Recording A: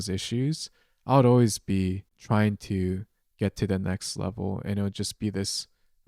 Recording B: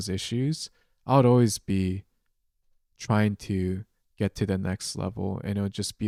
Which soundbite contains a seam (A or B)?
A